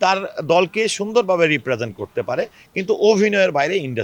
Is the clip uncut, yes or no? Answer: yes